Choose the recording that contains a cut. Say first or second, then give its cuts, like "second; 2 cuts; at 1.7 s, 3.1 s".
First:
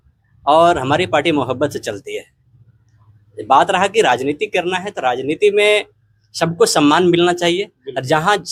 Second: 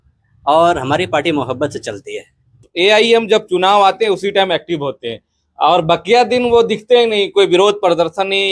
second; 1 cut; at 2.7 s